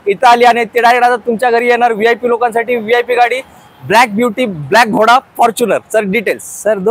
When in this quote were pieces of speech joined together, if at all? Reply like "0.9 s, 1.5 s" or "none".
none